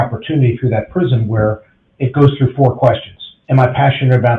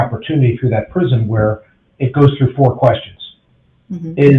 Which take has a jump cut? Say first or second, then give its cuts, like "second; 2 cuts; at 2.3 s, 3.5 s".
first; 1 cut; at 3.4 s